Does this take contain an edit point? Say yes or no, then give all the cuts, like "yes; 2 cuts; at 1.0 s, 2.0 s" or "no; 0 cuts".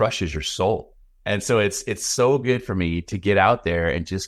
no; 0 cuts